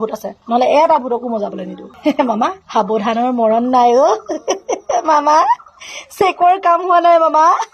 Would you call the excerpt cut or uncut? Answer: uncut